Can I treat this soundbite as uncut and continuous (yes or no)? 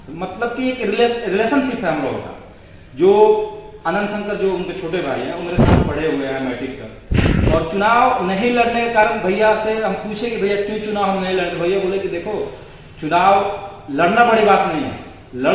yes